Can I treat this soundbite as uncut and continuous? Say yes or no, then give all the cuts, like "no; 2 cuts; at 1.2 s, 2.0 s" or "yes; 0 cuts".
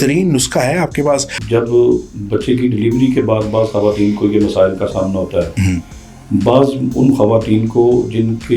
no; 1 cut; at 1.4 s